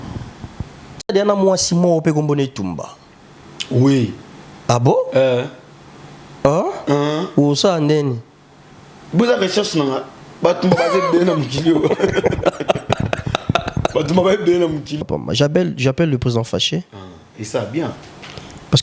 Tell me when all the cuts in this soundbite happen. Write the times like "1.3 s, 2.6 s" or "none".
1.1 s, 15.0 s